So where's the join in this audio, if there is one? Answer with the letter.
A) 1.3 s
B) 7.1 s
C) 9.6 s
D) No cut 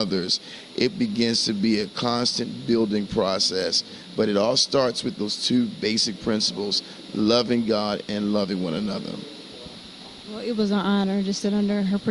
C